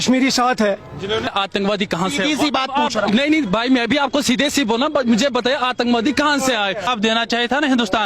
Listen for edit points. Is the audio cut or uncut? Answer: cut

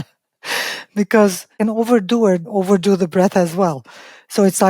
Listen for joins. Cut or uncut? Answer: cut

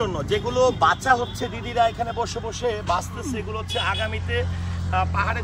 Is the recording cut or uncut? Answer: uncut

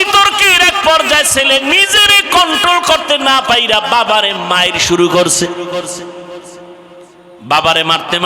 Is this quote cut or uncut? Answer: cut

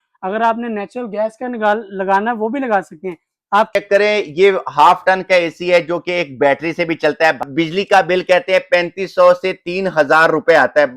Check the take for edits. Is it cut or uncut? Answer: cut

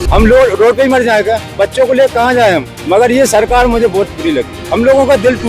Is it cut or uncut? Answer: cut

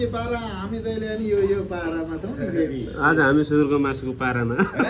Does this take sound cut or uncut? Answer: uncut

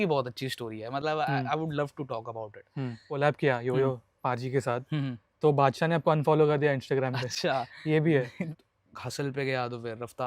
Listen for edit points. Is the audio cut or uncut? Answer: cut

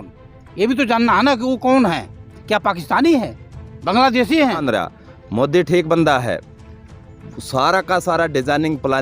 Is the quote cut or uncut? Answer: cut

